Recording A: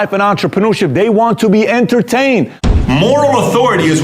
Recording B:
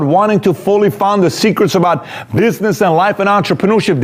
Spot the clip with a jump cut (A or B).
A